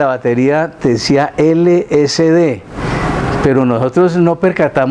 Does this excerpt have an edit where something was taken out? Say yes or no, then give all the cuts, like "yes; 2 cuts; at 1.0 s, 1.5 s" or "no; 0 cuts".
no; 0 cuts